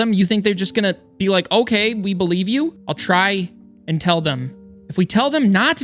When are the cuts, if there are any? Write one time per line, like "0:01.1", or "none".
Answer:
0:02.8